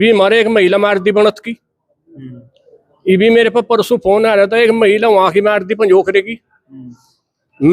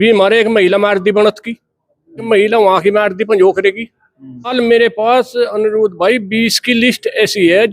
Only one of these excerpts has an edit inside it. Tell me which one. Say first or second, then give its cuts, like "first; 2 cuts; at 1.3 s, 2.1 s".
second; 2 cuts; at 2.3 s, 4.5 s